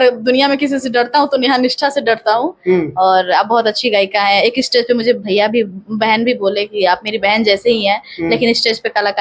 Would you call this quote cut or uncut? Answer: uncut